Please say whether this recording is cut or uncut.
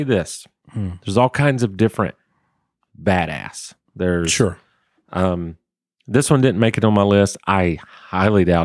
uncut